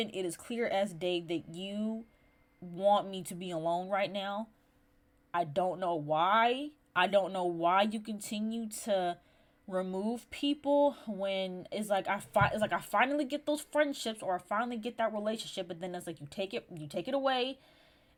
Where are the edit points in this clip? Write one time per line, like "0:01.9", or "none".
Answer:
none